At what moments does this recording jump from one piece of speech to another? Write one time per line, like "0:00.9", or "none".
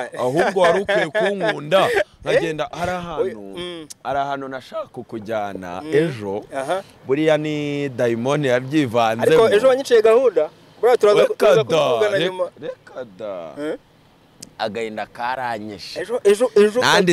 none